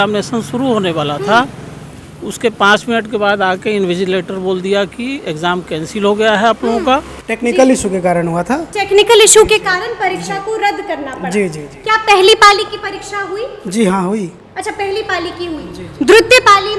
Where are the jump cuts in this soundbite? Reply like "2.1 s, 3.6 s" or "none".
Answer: 7.3 s